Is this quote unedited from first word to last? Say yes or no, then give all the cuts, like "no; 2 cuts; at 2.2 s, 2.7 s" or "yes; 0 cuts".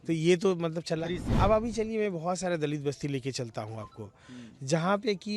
no; 1 cut; at 1.2 s